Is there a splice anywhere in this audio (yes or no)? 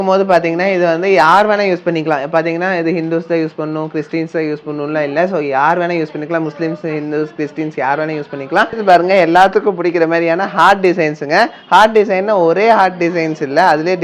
yes